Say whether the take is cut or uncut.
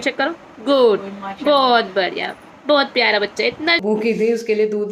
cut